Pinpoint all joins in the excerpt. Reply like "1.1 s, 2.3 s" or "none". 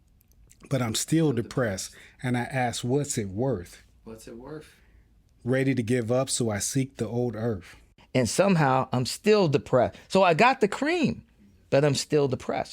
7.9 s